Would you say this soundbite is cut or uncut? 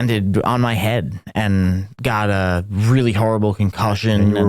uncut